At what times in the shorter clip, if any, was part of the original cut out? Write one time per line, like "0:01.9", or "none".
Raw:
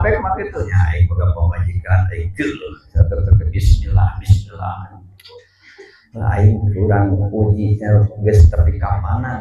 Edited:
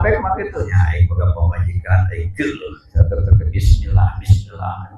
none